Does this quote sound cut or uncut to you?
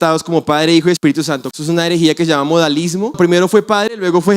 cut